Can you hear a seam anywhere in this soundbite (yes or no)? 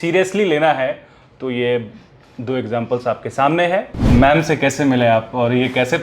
yes